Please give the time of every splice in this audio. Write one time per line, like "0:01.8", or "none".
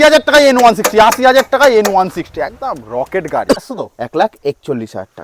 0:03.6